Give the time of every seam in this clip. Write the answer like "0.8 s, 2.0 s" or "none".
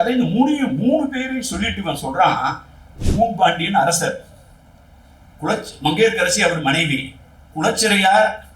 2.9 s

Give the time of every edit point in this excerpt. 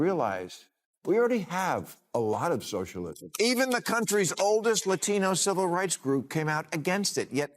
3.2 s

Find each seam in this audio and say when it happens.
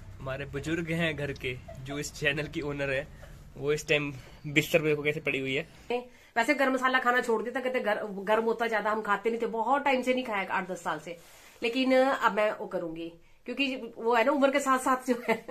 5.9 s

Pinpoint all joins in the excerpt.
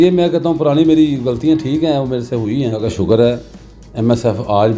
2.9 s

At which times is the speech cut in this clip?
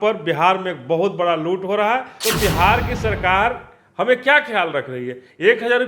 2.1 s

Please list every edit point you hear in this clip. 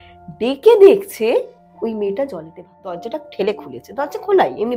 3.0 s

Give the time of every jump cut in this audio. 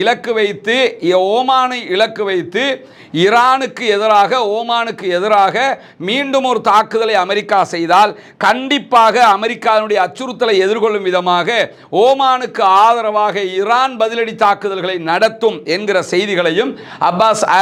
none

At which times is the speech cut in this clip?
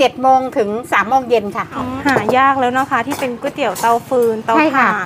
1.9 s

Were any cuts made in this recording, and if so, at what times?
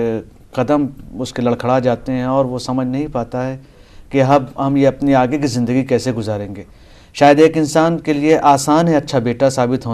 none

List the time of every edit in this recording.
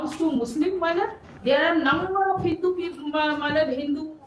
1.3 s

